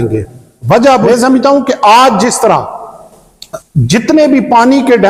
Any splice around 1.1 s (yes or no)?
yes